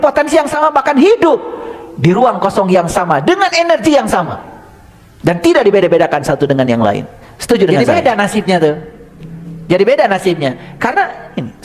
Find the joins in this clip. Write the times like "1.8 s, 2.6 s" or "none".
7.8 s